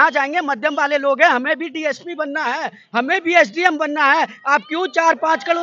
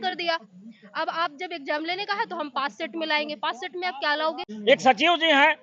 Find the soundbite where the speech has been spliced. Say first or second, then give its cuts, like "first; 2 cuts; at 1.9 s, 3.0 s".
second; 1 cut; at 4.5 s